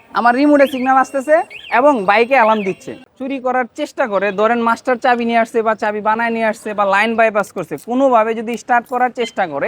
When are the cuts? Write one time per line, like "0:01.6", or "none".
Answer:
0:03.1